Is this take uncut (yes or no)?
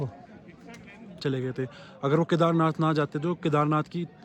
no